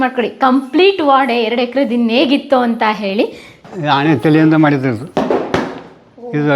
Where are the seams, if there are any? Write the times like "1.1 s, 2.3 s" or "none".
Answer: 3.5 s